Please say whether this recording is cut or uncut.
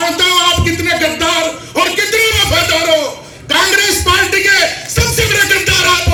uncut